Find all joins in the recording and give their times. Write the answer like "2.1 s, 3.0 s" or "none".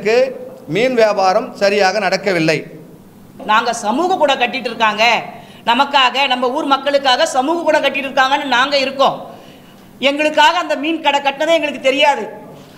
3.4 s